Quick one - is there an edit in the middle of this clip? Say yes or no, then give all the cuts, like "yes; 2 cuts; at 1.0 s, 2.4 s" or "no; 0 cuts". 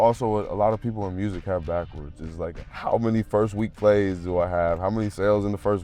yes; 1 cut; at 2.5 s